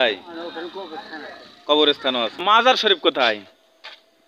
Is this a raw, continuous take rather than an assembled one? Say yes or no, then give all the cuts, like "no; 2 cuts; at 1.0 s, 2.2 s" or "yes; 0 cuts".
no; 1 cut; at 2.4 s